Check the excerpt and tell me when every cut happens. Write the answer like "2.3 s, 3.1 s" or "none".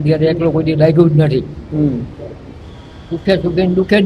none